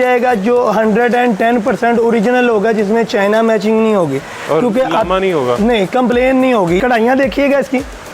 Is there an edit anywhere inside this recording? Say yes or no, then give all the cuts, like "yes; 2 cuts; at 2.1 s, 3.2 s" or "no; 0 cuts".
yes; 1 cut; at 6.8 s